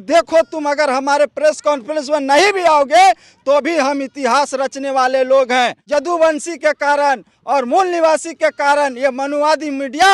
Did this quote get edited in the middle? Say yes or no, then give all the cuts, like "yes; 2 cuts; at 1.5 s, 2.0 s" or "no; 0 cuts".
no; 0 cuts